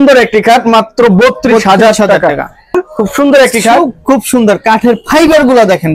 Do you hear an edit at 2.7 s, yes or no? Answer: yes